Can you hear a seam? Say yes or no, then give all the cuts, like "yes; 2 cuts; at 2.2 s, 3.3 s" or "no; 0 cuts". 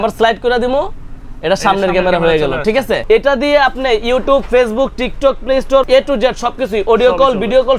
yes; 2 cuts; at 3.0 s, 5.8 s